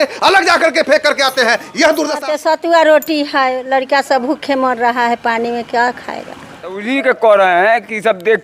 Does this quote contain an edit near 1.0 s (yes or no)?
no